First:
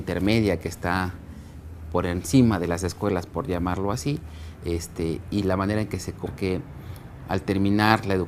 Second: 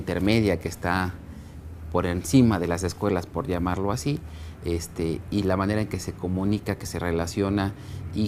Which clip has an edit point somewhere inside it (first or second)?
second